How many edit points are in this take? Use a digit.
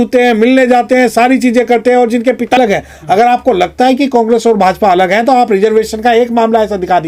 1